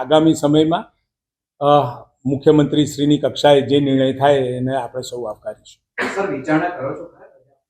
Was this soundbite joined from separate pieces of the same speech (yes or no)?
no